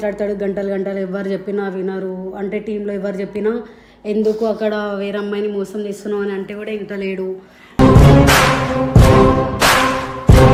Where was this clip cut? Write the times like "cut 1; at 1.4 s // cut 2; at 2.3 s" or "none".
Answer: none